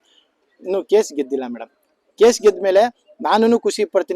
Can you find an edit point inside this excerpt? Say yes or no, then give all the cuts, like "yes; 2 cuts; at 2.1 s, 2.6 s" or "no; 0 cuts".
no; 0 cuts